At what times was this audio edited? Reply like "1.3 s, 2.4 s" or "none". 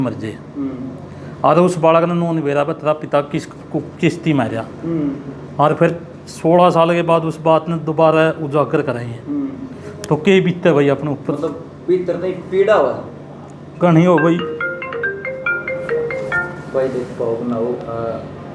none